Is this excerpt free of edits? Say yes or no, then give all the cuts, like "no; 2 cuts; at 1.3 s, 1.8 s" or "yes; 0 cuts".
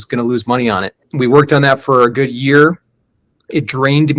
no; 1 cut; at 1.0 s